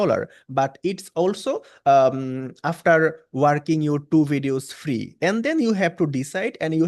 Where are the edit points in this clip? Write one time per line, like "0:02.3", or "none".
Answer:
none